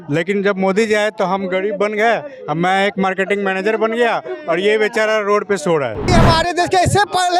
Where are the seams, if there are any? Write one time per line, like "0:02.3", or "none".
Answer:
0:06.0